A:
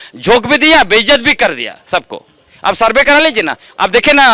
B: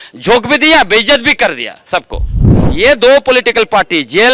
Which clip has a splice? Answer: B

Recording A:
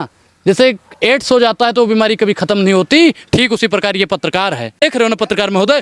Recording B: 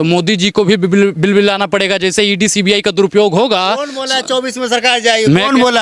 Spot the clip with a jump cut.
A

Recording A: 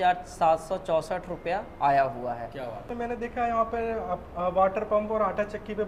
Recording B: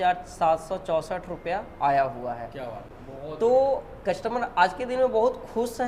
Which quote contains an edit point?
A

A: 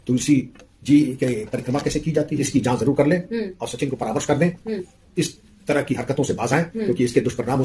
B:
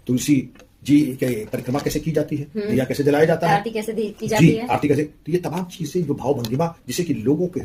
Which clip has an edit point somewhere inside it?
A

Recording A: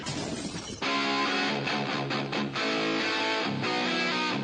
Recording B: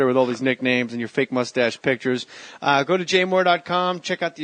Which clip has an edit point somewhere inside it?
B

